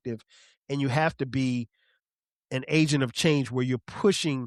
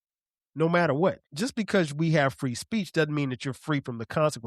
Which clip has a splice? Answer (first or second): second